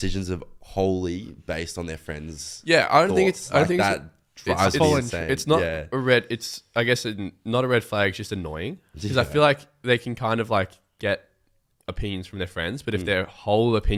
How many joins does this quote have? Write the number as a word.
zero